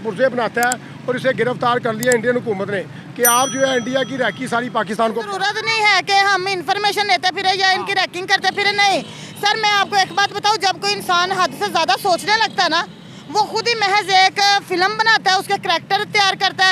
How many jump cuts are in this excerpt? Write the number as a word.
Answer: one